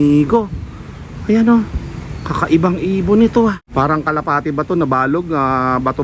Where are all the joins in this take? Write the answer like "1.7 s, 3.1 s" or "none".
3.6 s